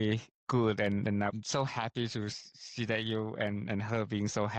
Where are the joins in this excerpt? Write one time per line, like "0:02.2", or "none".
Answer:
none